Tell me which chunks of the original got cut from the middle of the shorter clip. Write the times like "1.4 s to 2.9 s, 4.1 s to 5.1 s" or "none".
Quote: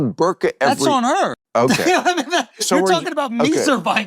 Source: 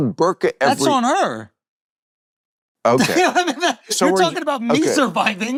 1.4 s to 2.7 s